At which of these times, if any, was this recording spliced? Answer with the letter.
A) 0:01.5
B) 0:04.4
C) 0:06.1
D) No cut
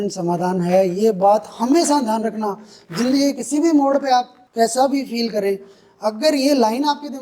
B